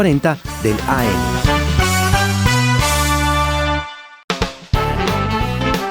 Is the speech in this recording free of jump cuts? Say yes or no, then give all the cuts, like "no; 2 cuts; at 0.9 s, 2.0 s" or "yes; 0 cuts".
no; 2 cuts; at 1.1 s, 4.1 s